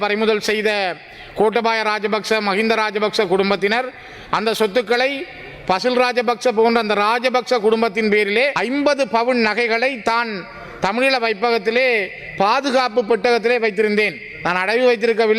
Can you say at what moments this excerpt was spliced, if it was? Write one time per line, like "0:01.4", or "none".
0:08.6